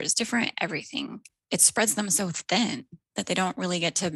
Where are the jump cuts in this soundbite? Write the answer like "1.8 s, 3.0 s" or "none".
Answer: 1.3 s